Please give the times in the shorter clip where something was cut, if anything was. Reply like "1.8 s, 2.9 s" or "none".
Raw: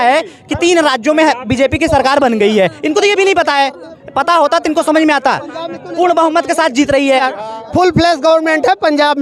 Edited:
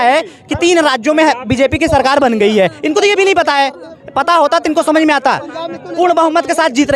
none